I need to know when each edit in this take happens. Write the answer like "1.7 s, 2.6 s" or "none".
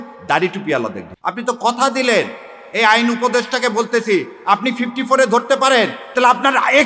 1.1 s